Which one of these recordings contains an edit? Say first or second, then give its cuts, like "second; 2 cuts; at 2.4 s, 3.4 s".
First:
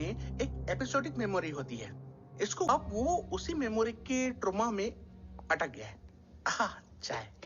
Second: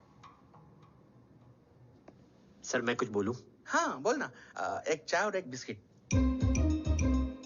first; 1 cut; at 2.7 s